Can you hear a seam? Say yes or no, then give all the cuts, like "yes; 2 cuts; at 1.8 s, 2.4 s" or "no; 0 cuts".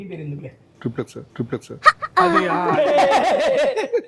no; 0 cuts